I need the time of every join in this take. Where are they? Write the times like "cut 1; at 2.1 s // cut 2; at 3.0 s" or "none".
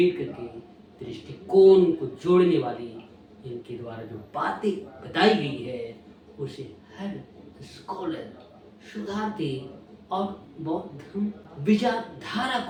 none